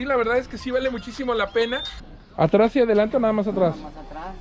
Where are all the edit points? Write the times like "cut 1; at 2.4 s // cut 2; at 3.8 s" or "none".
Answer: cut 1; at 2.0 s